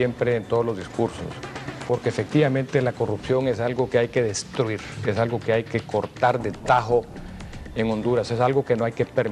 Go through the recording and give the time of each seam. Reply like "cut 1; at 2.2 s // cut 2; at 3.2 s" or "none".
cut 1; at 5.3 s